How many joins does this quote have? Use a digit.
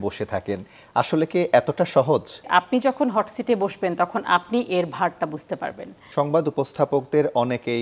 2